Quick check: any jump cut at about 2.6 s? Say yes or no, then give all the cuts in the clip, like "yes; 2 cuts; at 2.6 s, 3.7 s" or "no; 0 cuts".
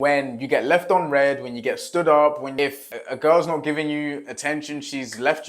yes; 1 cut; at 2.6 s